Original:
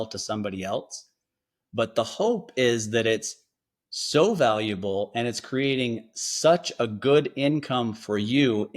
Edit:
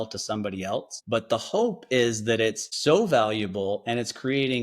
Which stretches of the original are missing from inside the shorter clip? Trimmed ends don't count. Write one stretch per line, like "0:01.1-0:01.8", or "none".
0:00.9-0:01.6
0:03.3-0:04.0